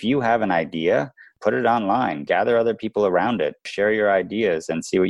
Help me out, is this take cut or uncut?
cut